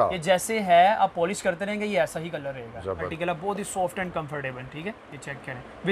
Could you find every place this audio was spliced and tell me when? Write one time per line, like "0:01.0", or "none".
0:03.1